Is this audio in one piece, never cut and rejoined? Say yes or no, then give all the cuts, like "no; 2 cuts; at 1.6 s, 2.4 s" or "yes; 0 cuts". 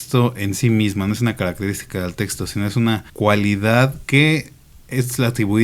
no; 2 cuts; at 3.1 s, 4.0 s